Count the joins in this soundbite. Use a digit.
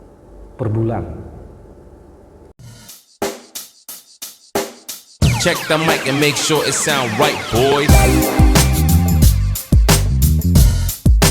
1